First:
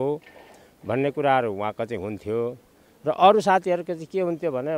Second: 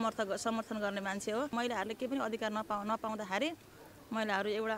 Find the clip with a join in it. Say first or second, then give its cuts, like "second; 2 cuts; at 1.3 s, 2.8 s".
second; 1 cut; at 1.5 s